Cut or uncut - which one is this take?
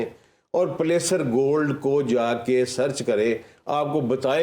uncut